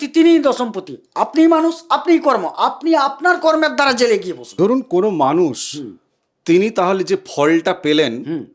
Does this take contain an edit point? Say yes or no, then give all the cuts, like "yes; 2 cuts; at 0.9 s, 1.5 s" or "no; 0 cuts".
yes; 1 cut; at 4.4 s